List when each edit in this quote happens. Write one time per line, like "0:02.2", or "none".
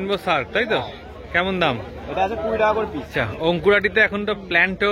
0:03.2